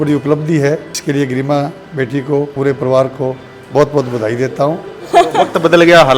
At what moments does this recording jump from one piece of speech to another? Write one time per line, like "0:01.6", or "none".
0:00.9
0:02.5
0:05.0